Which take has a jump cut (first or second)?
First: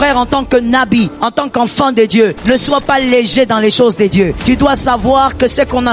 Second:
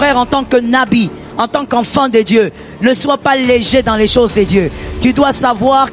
first